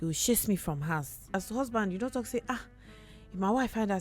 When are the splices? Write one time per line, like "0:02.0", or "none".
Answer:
0:01.3